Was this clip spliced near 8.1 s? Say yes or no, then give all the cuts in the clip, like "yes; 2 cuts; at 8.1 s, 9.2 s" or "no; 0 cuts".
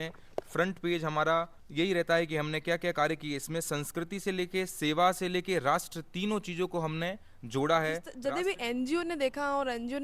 yes; 2 cuts; at 1.6 s, 8.1 s